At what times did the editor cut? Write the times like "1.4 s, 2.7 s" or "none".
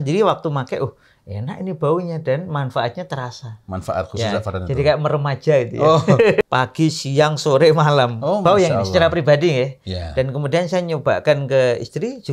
6.4 s